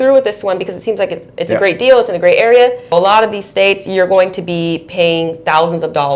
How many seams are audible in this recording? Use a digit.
1